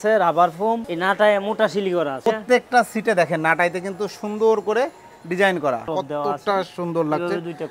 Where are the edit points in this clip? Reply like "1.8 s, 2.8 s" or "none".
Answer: 0.8 s, 2.1 s, 5.9 s